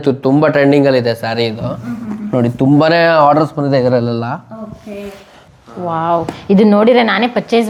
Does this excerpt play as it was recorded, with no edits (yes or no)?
yes